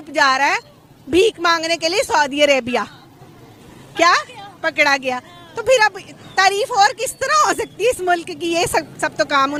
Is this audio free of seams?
yes; 0 cuts

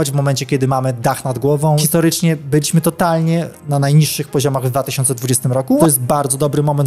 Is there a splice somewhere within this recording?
yes; 2 cuts; at 1.8 s, 5.8 s

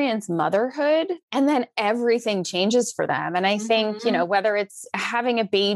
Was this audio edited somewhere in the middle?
yes; 1 cut; at 1.2 s

